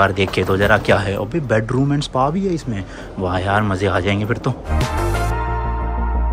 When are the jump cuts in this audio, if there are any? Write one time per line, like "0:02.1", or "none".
none